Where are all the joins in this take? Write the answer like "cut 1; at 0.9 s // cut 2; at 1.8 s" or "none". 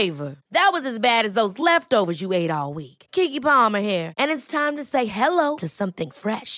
none